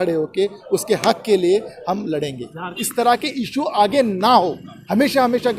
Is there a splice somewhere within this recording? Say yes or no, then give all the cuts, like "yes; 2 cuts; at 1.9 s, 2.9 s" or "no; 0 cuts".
yes; 1 cut; at 2.8 s